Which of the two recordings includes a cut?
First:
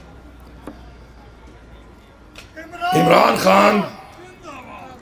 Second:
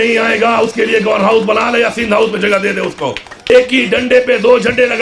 second; 1 cut; at 3.5 s

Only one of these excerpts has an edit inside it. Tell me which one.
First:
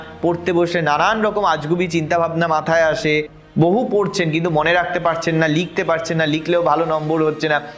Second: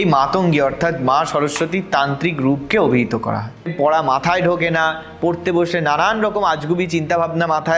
second; 1 cut; at 3.7 s

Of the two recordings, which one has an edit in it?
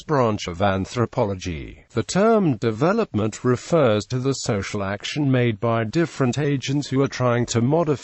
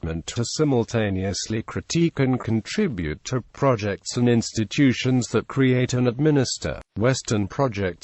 first; 1 cut; at 5.5 s

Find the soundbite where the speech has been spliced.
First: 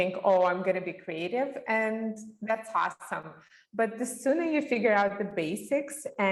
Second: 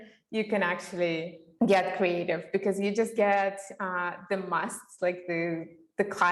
second; 1 cut; at 1.4 s

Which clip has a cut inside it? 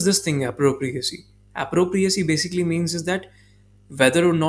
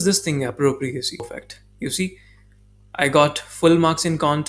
second; 1 cut; at 1.4 s

